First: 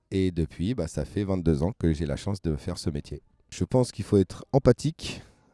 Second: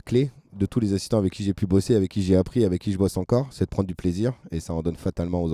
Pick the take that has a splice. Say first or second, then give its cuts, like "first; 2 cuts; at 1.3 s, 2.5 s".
first; 1 cut; at 3.5 s